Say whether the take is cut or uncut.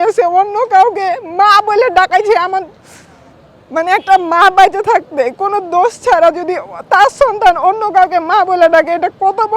uncut